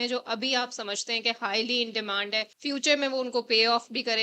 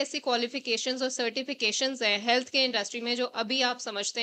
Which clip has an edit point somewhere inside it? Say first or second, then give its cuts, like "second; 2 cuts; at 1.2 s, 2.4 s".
first; 1 cut; at 2.5 s